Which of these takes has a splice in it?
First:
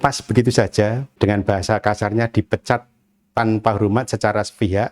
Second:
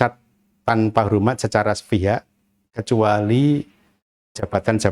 first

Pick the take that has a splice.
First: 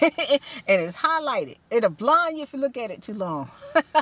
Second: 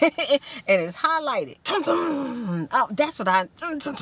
second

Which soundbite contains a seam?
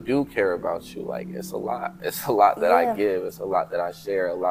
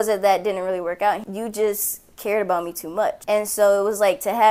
second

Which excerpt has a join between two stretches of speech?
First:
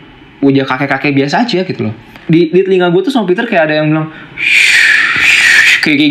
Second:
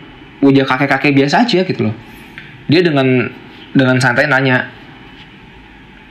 first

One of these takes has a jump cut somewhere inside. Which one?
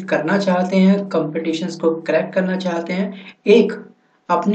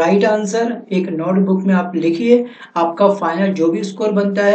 second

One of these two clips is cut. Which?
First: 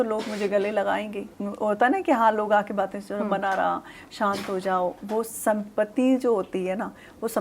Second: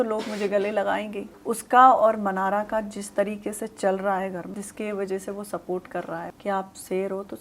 second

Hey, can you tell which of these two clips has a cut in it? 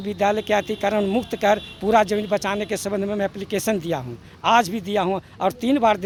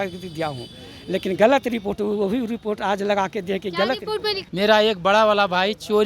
second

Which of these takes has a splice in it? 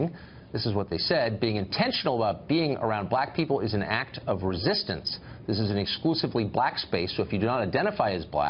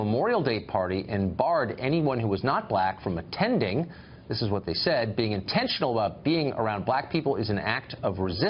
first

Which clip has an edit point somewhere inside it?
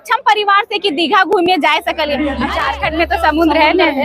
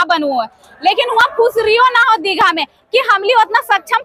first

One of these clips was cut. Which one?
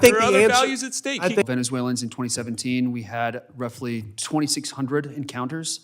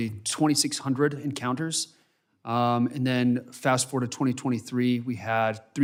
first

